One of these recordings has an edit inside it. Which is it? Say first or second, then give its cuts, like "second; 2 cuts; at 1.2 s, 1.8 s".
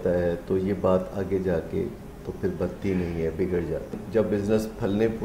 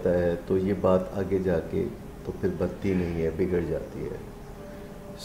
first; 1 cut; at 4.0 s